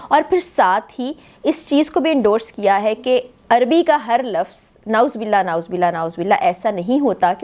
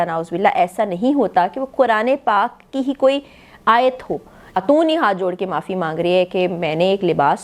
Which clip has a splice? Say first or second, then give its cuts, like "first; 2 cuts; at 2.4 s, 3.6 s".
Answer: second; 1 cut; at 4.6 s